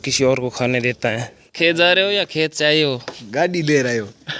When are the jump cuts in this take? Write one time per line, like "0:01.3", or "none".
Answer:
0:01.3